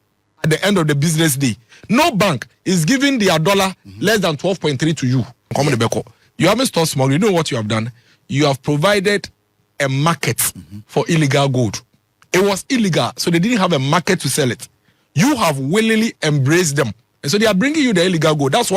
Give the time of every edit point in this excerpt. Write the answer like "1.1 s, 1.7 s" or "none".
5.5 s